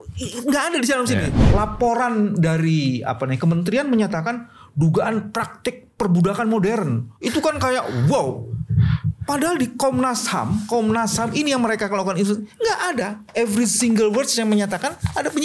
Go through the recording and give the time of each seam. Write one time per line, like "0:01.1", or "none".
0:01.4

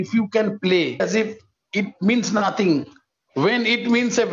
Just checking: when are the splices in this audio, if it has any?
0:01.0

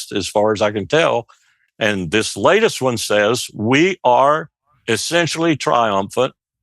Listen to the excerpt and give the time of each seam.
0:01.6

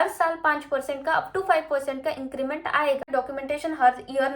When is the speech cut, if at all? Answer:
0:03.1

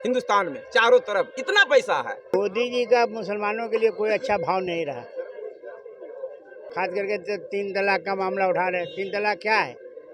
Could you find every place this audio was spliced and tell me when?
0:02.2

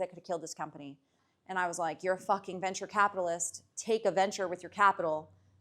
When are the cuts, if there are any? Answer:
0:01.1

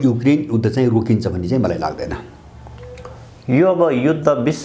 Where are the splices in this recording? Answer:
none

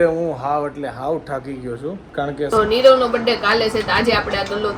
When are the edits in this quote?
0:02.5

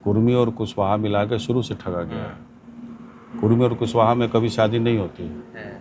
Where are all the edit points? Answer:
none

